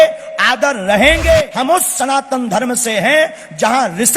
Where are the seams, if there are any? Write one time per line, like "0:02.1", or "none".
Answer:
0:01.5